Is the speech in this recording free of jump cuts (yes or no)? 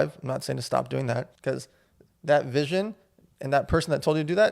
no